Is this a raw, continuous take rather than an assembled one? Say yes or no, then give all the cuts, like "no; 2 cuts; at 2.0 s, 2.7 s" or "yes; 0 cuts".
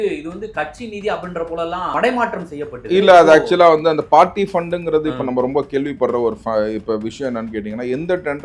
no; 1 cut; at 1.9 s